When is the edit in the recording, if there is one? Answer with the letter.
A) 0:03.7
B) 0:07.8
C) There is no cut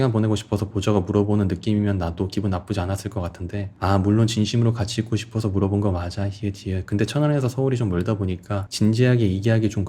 A